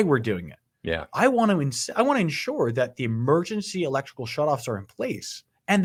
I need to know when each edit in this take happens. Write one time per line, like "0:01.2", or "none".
none